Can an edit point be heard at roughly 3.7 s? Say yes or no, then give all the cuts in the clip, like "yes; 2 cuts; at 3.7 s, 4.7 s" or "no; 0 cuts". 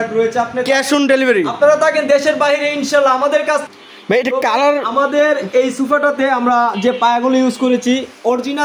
yes; 1 cut; at 3.7 s